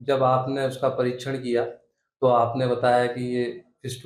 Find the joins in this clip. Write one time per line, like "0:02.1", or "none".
none